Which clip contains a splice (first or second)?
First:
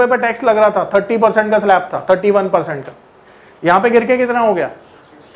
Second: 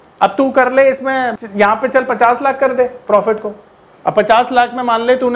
second